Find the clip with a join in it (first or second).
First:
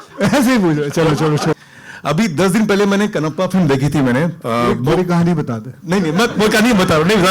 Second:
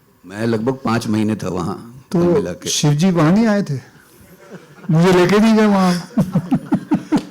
first